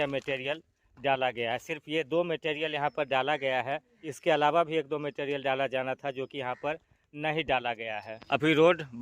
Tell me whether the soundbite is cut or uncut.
uncut